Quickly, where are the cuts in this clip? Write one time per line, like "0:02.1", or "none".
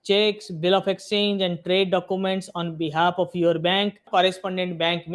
0:04.0